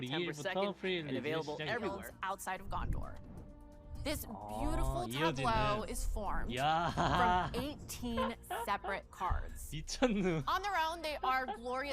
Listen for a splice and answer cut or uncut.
cut